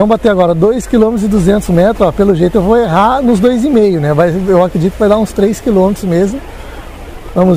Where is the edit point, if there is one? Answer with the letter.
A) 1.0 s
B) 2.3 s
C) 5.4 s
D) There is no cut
D